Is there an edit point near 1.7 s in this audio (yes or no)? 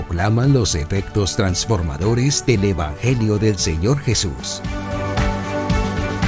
no